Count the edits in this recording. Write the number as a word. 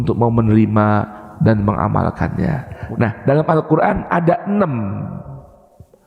one